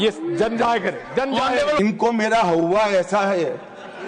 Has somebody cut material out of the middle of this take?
yes; 1 cut; at 1.8 s

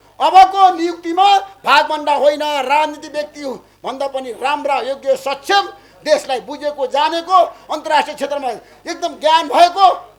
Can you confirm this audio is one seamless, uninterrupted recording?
yes; 0 cuts

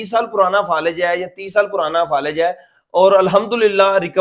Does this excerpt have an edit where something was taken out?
no; 0 cuts

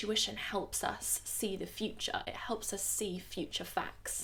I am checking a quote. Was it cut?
no; 0 cuts

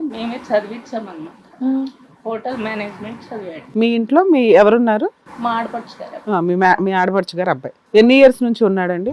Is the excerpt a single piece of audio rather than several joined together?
no; 3 cuts; at 3.6 s, 5.3 s, 7.7 s

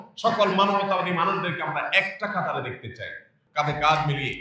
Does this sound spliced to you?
yes; 1 cut; at 3.4 s

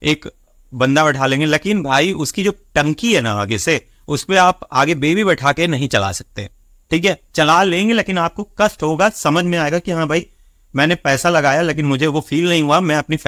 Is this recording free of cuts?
yes; 0 cuts

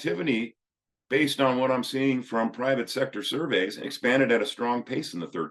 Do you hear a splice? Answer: yes; 1 cut; at 3.8 s

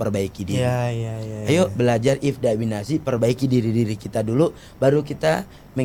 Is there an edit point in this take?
no; 0 cuts

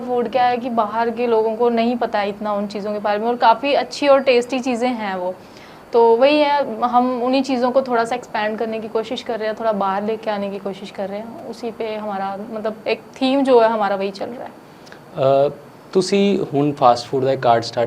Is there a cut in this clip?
no; 0 cuts

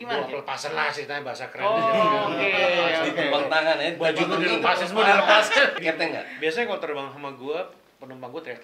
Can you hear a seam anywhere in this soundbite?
yes; 1 cut; at 5.8 s

